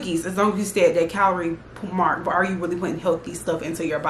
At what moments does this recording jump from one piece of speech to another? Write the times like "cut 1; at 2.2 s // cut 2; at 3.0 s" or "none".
none